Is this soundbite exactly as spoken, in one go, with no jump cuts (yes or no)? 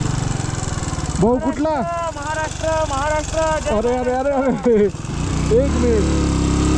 yes